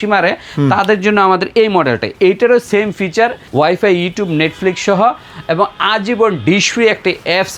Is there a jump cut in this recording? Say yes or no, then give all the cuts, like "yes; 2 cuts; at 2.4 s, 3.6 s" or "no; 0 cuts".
yes; 2 cuts; at 2.1 s, 3.4 s